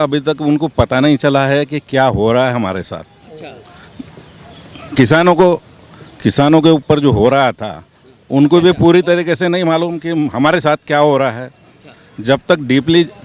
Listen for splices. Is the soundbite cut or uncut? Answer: uncut